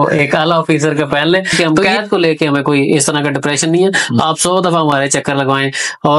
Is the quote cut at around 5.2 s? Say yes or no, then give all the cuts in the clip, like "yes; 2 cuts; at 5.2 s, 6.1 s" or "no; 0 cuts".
no; 1 cut; at 1.9 s